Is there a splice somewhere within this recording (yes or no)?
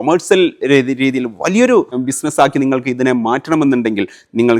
yes